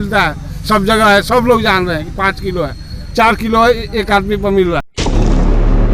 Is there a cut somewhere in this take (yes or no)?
yes